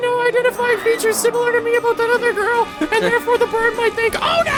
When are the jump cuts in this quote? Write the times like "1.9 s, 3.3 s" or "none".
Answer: none